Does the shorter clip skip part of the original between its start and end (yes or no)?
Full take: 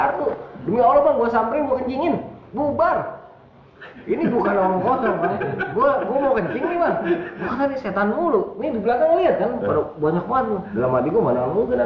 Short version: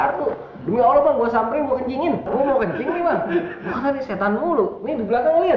yes